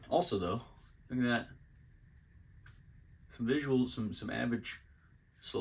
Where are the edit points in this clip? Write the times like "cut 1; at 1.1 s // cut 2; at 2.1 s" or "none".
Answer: none